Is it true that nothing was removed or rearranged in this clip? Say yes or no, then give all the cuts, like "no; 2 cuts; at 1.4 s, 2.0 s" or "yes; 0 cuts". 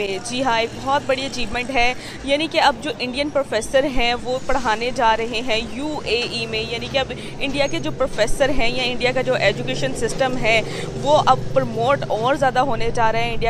yes; 0 cuts